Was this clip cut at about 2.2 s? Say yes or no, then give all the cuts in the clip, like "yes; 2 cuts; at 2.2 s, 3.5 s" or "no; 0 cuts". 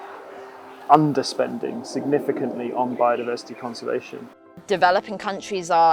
no; 1 cut; at 4.5 s